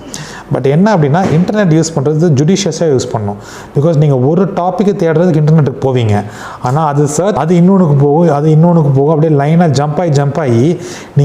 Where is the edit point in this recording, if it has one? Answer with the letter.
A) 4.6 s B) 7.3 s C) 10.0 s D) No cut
B